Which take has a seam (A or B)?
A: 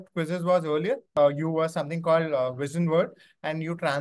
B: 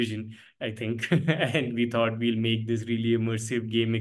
A